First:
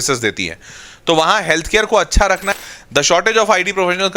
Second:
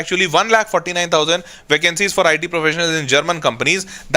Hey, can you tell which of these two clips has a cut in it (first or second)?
first